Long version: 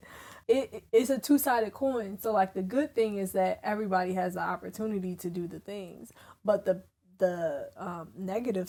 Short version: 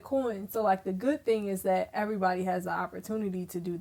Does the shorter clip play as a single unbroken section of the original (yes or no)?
yes